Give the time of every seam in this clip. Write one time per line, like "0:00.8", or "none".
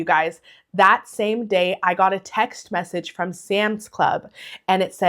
none